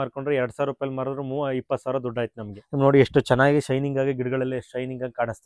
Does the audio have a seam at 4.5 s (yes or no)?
no